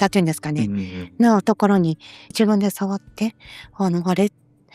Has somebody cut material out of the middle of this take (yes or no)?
yes